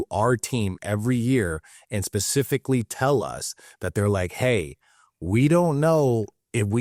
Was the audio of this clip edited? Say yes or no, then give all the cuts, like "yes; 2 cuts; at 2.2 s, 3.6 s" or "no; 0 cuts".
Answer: no; 0 cuts